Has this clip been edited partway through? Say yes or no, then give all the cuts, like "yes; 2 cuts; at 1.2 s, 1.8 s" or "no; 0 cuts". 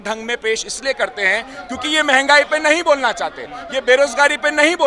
no; 0 cuts